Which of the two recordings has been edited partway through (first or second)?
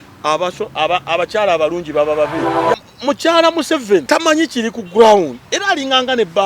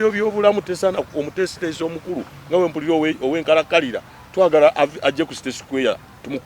first